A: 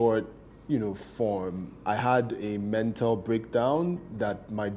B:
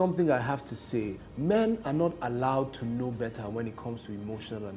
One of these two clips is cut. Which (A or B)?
B